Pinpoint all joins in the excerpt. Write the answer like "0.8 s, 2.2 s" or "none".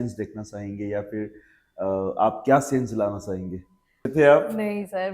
4.1 s